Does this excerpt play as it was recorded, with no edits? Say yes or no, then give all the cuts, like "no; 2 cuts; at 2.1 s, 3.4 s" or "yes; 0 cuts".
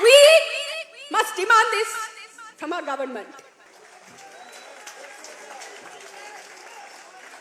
no; 1 cut; at 3.7 s